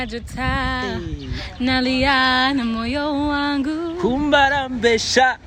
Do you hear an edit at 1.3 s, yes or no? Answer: no